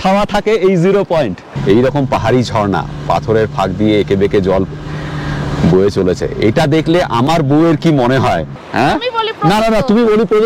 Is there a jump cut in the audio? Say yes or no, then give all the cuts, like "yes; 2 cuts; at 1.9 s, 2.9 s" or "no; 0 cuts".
yes; 2 cuts; at 1.6 s, 8.6 s